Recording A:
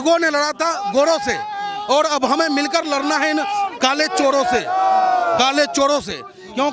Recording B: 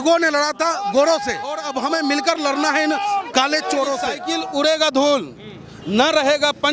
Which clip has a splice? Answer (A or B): B